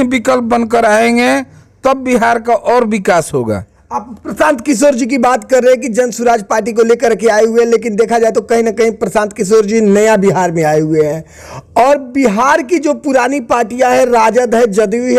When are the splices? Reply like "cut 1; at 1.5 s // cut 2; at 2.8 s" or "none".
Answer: none